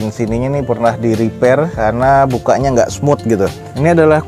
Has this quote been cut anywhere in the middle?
no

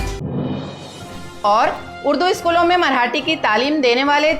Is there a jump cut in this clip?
yes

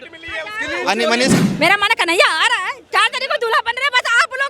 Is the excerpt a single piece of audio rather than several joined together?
no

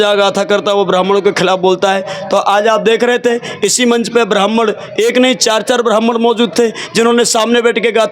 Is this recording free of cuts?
yes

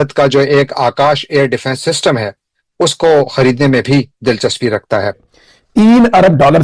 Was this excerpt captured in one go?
no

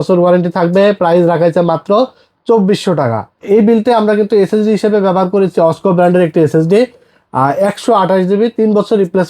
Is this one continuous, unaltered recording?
no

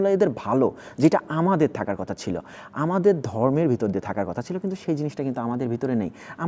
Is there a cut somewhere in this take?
no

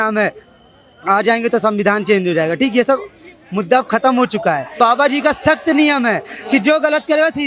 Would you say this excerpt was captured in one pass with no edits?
no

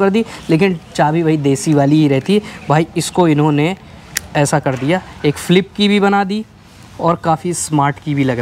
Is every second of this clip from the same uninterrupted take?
yes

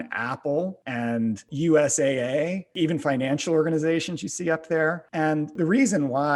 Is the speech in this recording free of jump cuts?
no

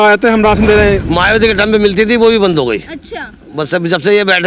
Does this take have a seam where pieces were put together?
yes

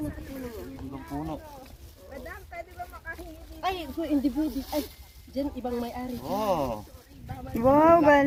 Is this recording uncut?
yes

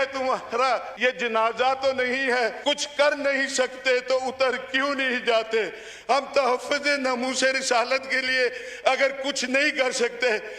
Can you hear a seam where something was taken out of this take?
yes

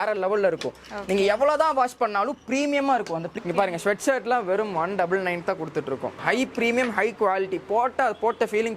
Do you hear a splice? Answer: yes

